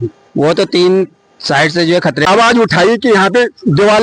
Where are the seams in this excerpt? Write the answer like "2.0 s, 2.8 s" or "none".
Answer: 2.3 s